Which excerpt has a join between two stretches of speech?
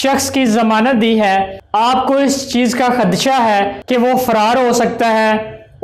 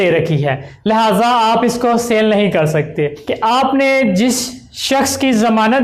second; 1 cut; at 3.2 s

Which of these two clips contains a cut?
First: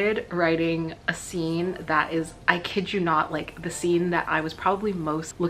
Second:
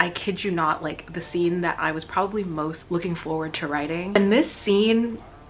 second; 1 cut; at 4.1 s

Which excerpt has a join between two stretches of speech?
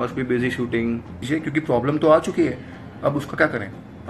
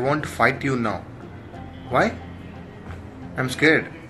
first; 1 cut; at 1.2 s

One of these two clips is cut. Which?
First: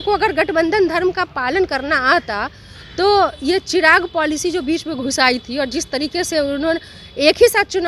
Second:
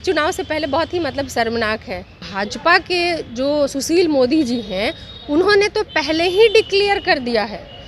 second; 1 cut; at 2.2 s

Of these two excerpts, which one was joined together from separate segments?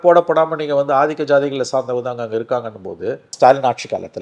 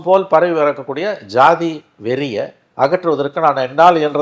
first; 1 cut; at 3.3 s

